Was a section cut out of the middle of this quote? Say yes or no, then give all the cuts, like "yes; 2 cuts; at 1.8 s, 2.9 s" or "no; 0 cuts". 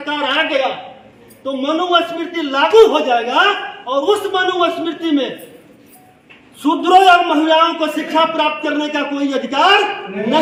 no; 0 cuts